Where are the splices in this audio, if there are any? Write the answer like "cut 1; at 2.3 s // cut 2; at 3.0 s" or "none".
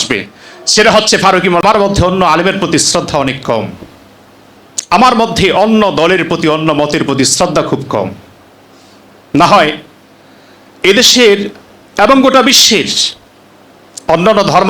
cut 1; at 1.6 s